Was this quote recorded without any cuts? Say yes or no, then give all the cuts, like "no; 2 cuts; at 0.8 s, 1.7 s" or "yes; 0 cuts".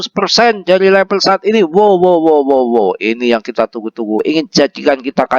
no; 1 cut; at 4.2 s